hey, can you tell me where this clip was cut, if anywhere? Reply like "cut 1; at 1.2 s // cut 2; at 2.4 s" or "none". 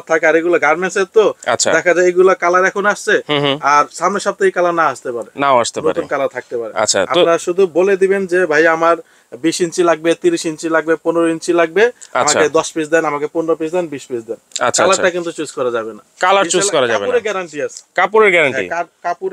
none